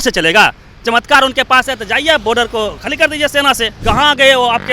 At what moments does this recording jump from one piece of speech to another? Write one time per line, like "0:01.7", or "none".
0:03.7